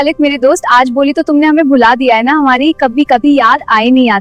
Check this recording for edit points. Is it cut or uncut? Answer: uncut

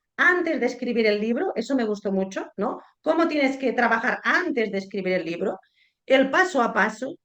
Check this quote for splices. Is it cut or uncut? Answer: uncut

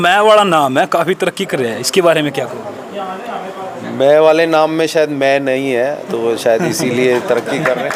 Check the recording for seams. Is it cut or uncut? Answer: uncut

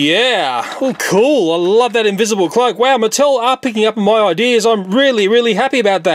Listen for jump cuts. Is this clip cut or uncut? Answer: uncut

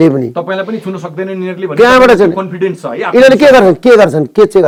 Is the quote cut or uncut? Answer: uncut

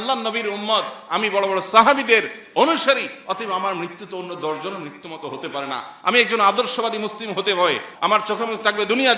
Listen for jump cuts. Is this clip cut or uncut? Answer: cut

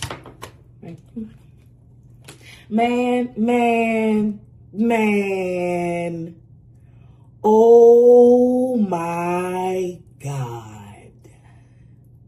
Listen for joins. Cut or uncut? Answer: uncut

